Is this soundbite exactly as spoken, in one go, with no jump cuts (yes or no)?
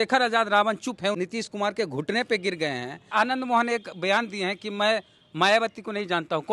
no